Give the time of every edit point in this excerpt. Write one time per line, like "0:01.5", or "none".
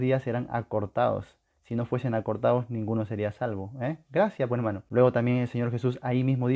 0:04.8